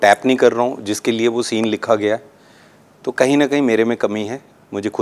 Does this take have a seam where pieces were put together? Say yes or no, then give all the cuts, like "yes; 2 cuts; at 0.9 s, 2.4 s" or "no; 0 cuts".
no; 0 cuts